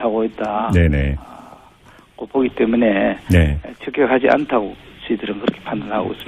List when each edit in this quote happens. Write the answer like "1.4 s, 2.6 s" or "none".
none